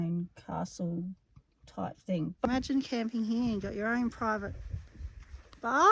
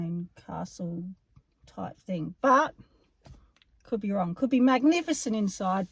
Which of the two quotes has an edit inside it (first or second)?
first